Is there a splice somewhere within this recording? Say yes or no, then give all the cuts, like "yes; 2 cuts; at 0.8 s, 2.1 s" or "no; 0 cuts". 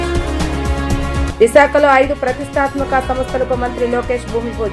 yes; 1 cut; at 1.2 s